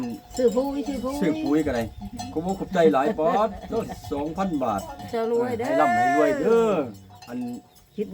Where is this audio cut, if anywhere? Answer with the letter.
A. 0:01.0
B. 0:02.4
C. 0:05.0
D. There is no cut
C